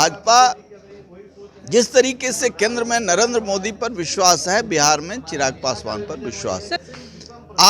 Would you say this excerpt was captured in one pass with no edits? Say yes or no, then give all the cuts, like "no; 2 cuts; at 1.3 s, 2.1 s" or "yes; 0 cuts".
no; 1 cut; at 6.8 s